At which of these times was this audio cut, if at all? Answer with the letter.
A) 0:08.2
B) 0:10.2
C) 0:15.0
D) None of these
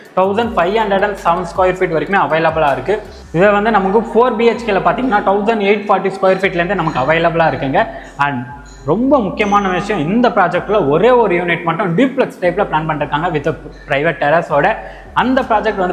D